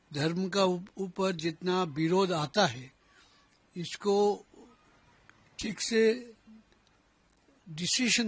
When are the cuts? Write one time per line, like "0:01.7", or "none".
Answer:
none